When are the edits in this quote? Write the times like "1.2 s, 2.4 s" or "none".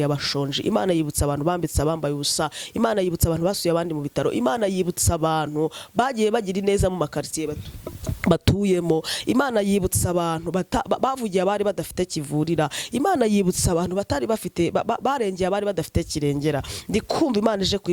none